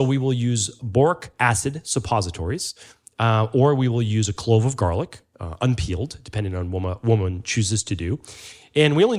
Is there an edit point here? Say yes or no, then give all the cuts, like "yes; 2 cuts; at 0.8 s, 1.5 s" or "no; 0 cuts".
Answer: yes; 1 cut; at 1.3 s